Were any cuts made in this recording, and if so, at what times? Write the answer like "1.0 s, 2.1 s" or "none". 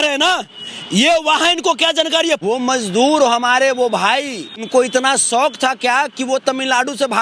2.5 s, 4.7 s